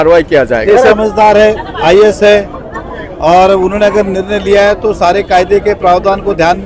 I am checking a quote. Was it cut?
yes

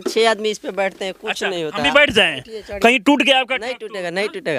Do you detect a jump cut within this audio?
no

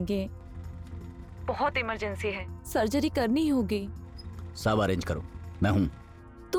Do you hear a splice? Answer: no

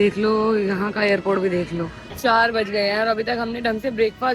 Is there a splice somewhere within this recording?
yes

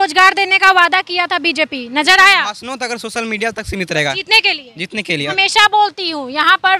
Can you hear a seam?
yes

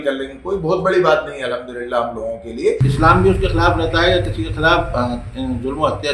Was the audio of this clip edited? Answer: yes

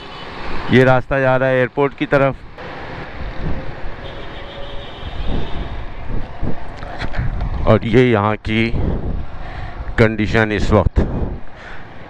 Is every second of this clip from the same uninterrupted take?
no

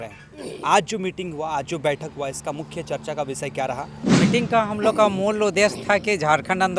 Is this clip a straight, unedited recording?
no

